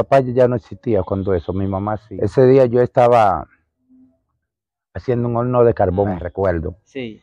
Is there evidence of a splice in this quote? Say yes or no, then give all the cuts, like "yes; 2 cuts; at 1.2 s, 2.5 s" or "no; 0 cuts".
yes; 2 cuts; at 2.1 s, 6.3 s